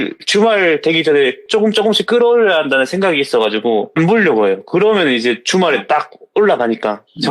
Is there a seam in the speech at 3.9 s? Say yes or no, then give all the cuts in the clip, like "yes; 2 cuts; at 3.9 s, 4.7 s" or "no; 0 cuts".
yes; 1 cut; at 3.9 s